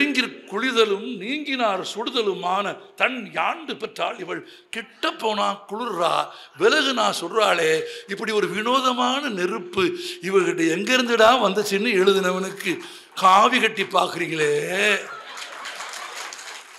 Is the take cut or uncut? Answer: uncut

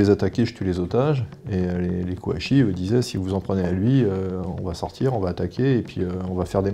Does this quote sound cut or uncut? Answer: uncut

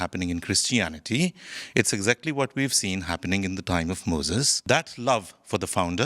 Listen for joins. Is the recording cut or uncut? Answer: cut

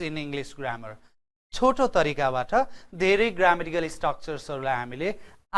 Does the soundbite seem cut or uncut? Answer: uncut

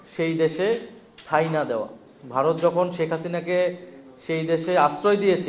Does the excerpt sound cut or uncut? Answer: uncut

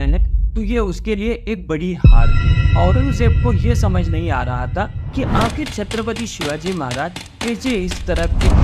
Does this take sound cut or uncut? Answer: uncut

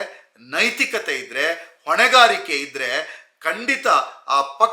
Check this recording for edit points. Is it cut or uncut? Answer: uncut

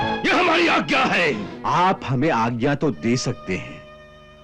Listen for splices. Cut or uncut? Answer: cut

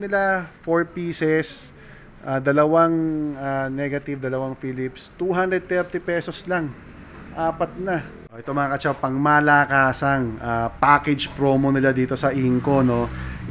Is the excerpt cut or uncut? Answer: cut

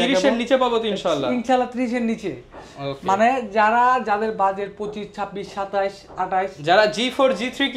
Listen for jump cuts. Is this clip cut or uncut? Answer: uncut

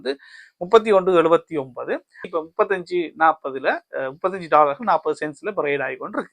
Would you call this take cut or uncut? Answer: cut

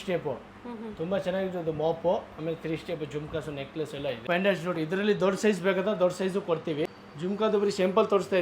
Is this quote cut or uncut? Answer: cut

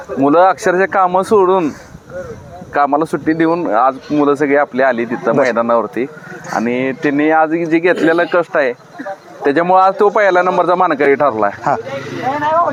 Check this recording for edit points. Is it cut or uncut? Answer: uncut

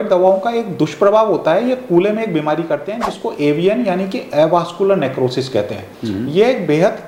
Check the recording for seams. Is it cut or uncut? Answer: uncut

